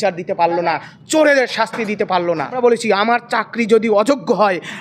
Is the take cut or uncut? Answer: cut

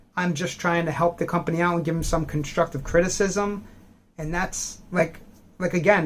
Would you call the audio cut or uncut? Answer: uncut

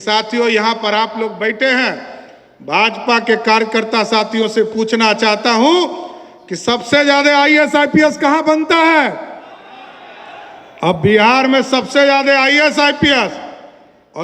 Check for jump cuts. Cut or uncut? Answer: uncut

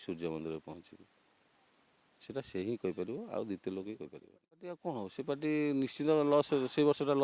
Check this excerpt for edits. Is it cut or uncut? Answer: cut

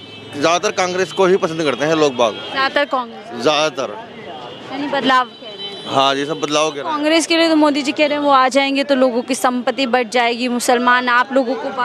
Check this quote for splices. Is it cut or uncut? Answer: uncut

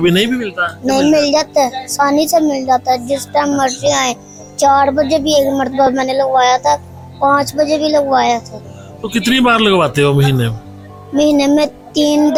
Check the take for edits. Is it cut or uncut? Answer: uncut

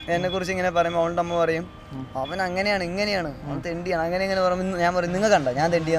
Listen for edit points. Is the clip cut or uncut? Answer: uncut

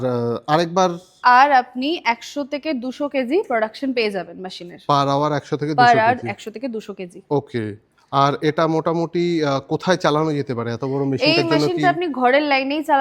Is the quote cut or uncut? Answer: cut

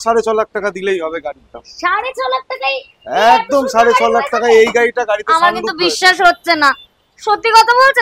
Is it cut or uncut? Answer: uncut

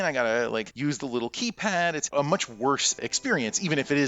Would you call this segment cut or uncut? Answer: uncut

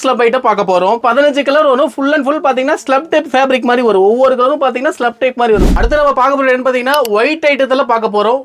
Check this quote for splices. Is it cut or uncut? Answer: cut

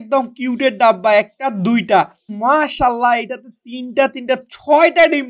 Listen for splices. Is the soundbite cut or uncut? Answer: cut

